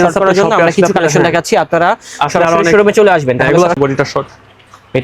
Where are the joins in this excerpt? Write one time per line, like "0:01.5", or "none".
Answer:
0:03.8